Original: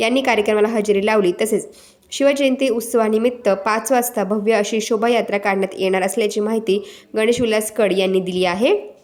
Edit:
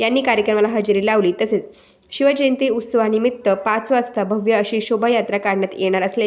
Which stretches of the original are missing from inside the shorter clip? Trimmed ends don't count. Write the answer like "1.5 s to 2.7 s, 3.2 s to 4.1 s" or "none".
none